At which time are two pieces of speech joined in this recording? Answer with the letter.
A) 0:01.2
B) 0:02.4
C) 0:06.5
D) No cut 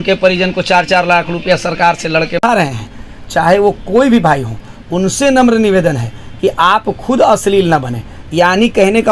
B